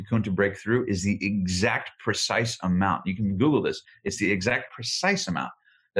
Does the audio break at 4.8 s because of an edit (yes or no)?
yes